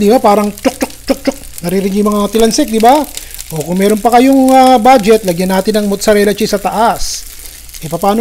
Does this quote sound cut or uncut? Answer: uncut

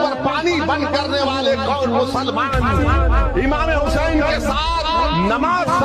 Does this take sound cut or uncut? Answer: uncut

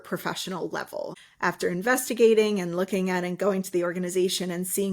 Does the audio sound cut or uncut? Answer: cut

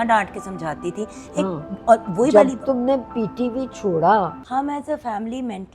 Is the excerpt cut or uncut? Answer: cut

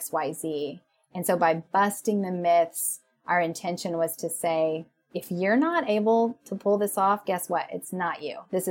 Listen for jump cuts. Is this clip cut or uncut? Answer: uncut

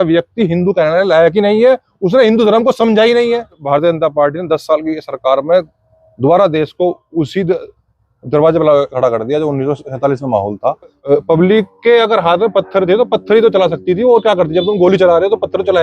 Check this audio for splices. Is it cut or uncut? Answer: cut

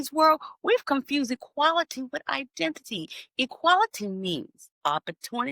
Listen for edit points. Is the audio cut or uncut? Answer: cut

